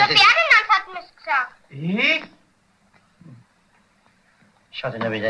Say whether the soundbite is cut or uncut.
cut